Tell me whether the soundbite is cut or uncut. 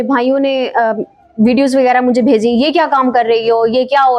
uncut